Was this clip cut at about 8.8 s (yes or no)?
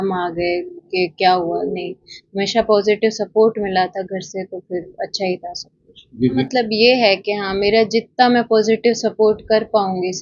no